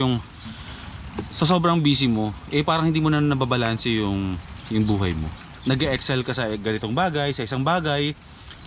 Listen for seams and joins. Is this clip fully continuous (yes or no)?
yes